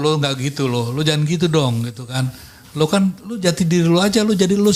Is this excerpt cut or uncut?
uncut